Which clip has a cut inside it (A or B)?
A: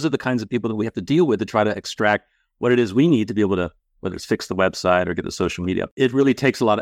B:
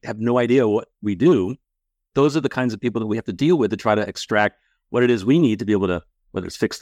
A